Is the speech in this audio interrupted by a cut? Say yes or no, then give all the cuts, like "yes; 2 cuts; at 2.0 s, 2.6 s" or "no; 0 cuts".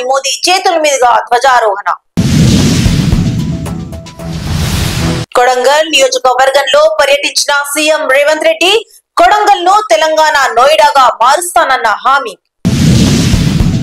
no; 0 cuts